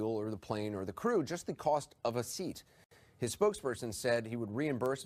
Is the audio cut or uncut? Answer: uncut